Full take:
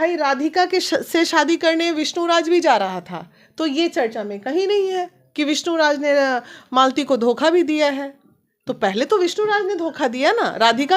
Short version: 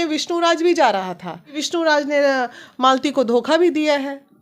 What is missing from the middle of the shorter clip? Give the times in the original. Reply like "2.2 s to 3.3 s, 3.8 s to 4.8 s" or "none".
3.5 s to 5.5 s

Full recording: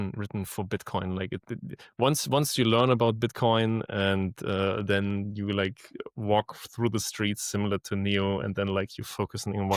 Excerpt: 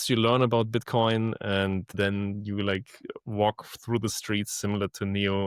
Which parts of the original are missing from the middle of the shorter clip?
4.4 s to 4.8 s

